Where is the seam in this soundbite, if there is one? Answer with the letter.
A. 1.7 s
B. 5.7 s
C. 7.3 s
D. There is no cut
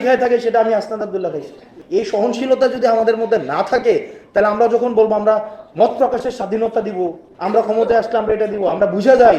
A